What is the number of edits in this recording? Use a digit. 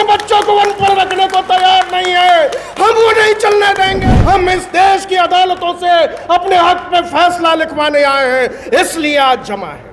1